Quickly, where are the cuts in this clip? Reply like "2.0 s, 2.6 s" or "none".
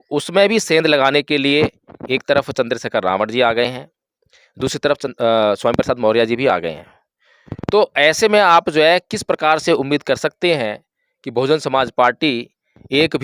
none